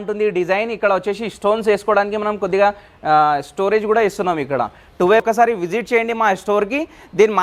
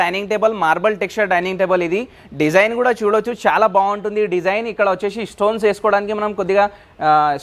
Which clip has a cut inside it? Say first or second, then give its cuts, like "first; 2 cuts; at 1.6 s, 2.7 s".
first; 1 cut; at 5.2 s